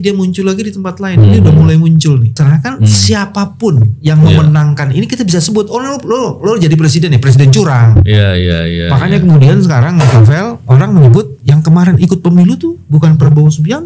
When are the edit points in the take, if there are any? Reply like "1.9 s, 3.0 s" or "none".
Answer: 2.3 s